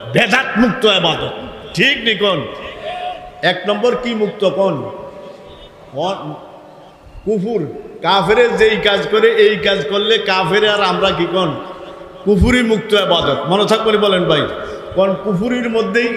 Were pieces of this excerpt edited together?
no; 0 cuts

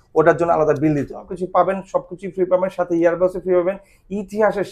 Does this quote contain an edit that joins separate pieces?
yes; 1 cut; at 1.4 s

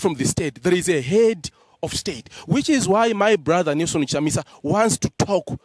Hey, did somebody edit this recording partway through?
no; 0 cuts

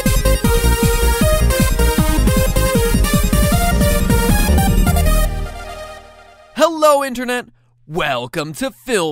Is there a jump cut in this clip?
no; 0 cuts

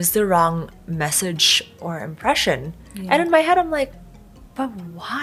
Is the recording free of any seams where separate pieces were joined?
yes; 0 cuts

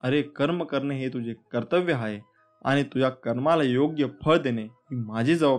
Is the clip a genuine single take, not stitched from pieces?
yes; 0 cuts

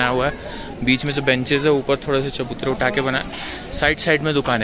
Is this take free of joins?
yes; 0 cuts

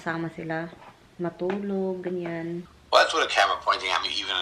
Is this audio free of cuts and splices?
no; 1 cut; at 2.7 s

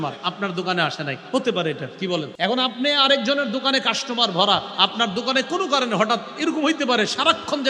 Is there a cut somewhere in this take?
yes; 1 cut; at 2.3 s

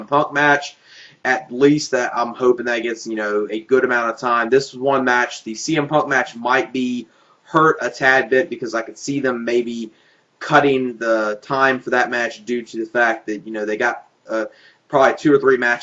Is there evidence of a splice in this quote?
no; 0 cuts

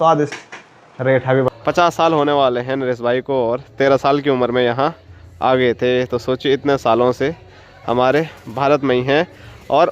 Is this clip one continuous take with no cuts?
no; 1 cut; at 1.5 s

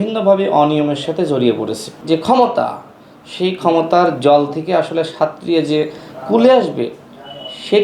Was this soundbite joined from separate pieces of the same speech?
yes; 1 cut; at 1.9 s

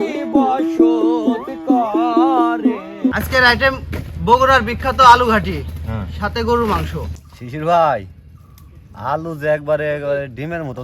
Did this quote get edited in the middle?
yes; 2 cuts; at 3.2 s, 7.5 s

